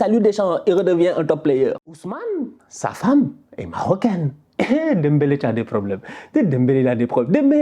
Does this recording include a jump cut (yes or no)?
yes